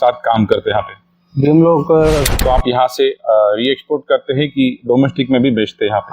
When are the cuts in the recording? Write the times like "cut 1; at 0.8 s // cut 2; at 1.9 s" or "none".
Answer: cut 1; at 2.2 s